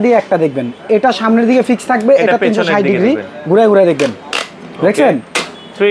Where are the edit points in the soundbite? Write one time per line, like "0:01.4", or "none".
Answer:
0:04.3